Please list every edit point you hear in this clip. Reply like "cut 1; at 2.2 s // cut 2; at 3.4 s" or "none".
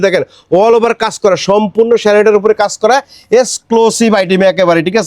none

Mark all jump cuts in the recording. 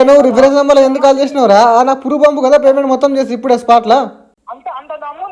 none

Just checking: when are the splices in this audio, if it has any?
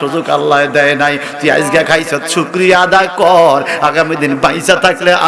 none

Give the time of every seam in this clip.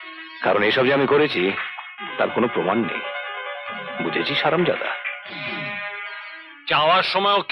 none

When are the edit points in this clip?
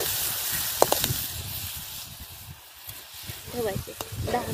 cut 1; at 3.5 s

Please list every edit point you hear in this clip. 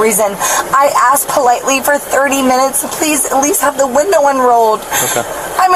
none

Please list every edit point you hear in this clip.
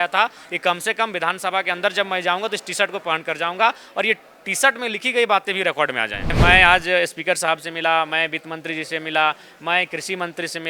cut 1; at 6.3 s

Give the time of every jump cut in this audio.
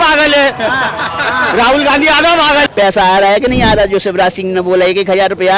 cut 1; at 2.7 s

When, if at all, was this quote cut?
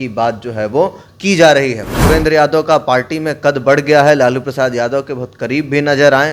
cut 1; at 2.0 s

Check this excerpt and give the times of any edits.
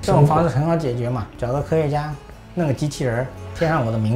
cut 1; at 1.3 s

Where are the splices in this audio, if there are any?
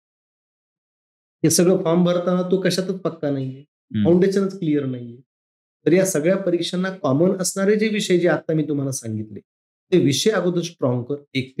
none

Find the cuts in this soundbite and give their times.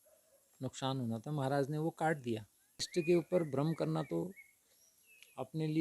cut 1; at 2.9 s

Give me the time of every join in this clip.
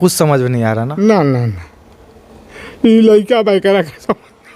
none

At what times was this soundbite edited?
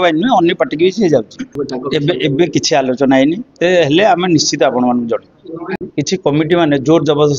cut 1; at 1.5 s // cut 2; at 5.9 s

